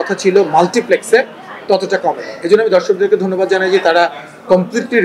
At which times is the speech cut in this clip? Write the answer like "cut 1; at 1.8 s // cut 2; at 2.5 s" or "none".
none